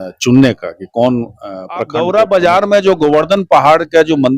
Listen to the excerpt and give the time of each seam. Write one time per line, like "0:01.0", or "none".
0:01.9